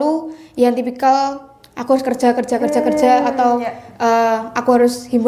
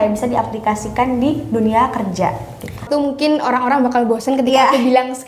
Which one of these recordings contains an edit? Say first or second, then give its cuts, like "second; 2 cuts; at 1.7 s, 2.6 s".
second; 1 cut; at 2.8 s